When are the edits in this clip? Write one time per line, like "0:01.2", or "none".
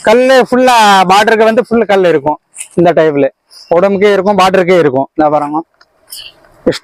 none